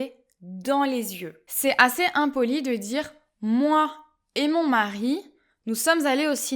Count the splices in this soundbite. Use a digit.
1